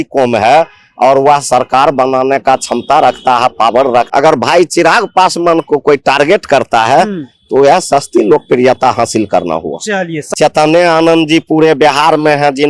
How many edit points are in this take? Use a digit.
2